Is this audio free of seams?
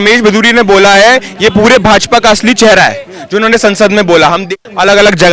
no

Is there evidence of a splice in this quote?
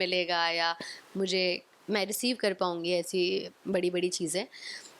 no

